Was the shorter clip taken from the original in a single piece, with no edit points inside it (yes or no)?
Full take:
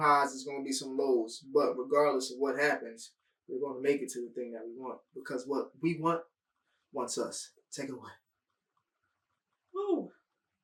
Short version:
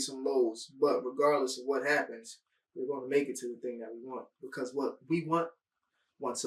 yes